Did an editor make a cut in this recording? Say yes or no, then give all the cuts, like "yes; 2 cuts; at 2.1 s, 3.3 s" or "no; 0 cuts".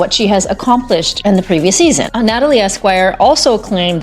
yes; 1 cut; at 2.1 s